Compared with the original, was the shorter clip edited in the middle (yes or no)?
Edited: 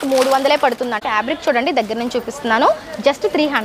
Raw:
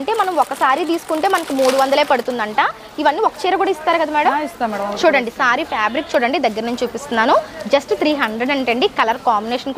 yes